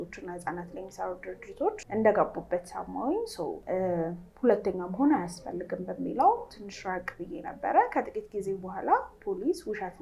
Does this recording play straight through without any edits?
no; 2 cuts; at 1.8 s, 3.6 s

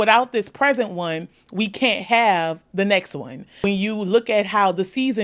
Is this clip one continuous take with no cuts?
no; 1 cut; at 3.6 s

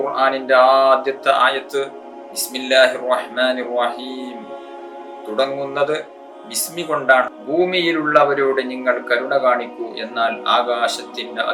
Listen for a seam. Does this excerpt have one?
yes; 1 cut; at 7.3 s

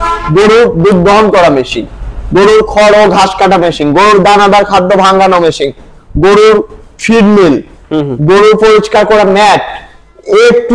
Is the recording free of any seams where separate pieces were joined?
yes; 0 cuts

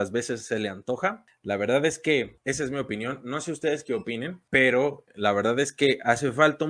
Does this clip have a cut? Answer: yes; 4 cuts; at 1.3 s, 2.4 s, 4.4 s, 5.0 s

